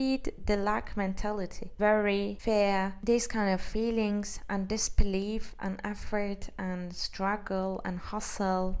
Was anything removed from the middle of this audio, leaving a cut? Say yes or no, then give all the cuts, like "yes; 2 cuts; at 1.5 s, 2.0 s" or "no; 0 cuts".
no; 0 cuts